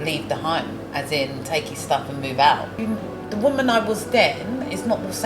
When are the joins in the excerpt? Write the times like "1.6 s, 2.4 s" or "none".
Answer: 2.8 s